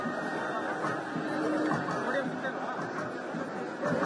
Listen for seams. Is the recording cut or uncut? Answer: uncut